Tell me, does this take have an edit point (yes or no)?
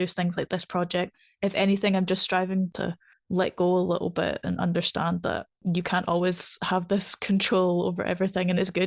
yes